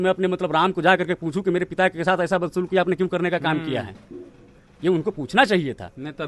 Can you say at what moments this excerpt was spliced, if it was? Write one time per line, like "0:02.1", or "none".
none